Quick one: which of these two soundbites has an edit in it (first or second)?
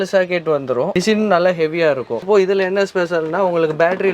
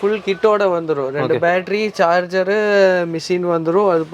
first